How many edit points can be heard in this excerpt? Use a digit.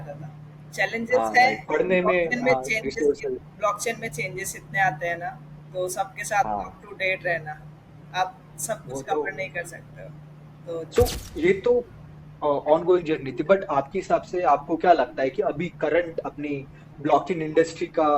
1